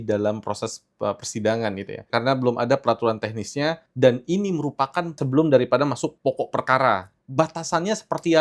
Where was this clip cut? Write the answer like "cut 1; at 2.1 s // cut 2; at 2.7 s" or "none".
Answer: cut 1; at 2.0 s // cut 2; at 3.9 s // cut 3; at 5.2 s // cut 4; at 6.2 s // cut 5; at 7.1 s